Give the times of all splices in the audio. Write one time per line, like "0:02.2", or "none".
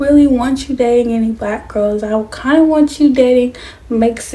none